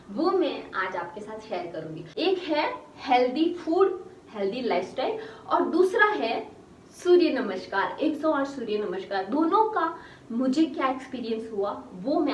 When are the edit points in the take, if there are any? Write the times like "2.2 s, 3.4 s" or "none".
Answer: 2.0 s